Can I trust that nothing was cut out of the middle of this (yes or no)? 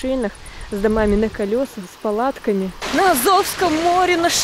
no